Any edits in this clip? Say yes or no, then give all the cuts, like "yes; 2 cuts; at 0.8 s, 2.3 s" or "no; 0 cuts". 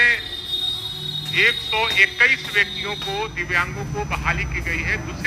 no; 0 cuts